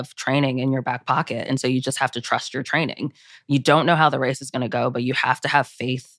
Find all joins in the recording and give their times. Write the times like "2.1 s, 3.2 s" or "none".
none

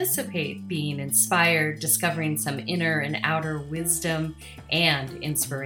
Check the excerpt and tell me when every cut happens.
none

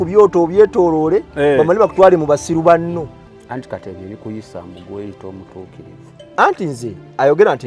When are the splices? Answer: 3.3 s

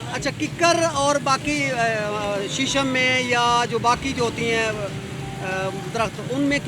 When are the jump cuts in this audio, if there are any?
none

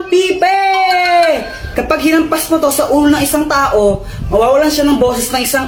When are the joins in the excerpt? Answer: none

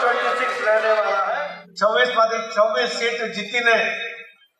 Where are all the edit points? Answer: 1.4 s

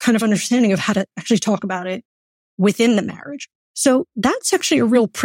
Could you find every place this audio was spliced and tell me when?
none

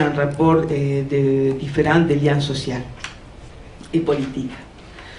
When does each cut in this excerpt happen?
3.6 s

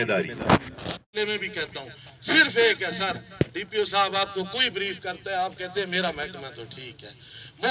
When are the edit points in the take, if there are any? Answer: 1.2 s

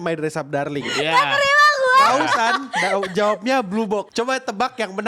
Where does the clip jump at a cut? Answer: 4.1 s

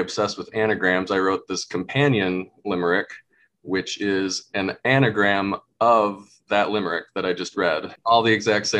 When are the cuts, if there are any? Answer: 7.9 s

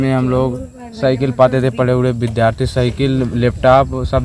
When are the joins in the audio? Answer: none

